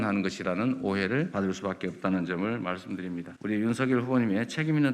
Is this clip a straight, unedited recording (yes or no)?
no